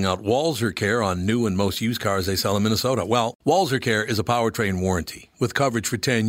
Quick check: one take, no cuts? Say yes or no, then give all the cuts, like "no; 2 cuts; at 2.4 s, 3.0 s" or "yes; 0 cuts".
yes; 0 cuts